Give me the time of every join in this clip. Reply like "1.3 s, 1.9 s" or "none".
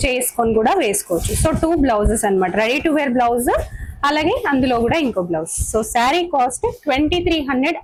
none